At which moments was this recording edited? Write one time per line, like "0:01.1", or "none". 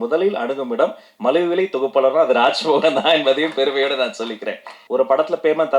0:04.8